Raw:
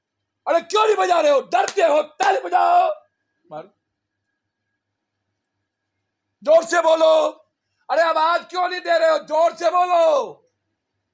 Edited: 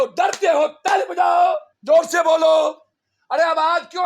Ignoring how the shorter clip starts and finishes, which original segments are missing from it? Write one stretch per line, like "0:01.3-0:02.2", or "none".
0:03.1-0:06.3